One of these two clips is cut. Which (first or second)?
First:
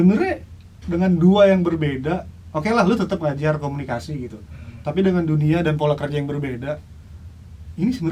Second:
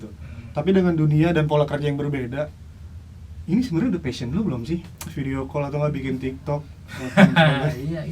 second